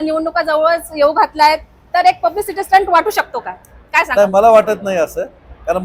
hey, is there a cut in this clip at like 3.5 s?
no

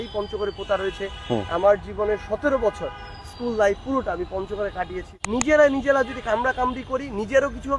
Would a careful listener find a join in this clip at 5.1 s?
yes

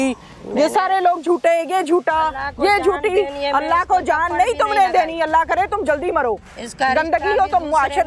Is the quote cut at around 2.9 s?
no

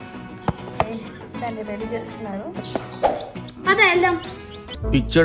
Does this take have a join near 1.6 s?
no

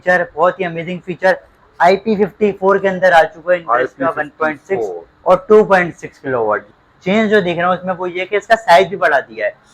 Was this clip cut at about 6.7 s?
yes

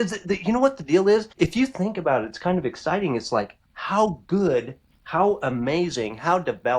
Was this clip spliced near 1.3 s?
yes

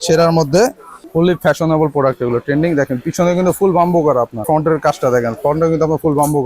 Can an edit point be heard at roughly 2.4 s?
no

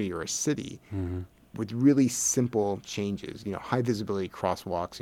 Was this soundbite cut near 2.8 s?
no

